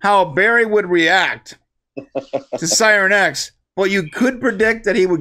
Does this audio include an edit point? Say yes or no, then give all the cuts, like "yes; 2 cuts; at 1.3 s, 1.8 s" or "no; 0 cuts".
no; 0 cuts